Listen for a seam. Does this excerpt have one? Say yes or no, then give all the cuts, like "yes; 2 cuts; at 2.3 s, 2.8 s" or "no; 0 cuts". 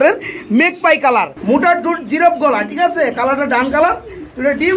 yes; 1 cut; at 1.3 s